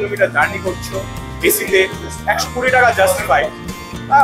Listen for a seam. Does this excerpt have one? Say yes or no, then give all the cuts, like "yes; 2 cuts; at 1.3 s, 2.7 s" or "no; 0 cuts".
no; 0 cuts